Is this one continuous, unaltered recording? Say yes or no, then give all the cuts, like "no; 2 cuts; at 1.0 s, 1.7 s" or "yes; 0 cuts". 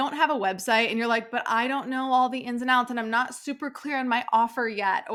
yes; 0 cuts